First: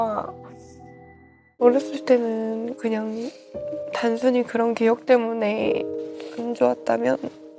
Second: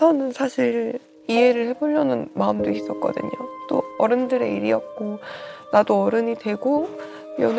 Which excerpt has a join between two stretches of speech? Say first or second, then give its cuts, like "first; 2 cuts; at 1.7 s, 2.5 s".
first; 1 cut; at 1.6 s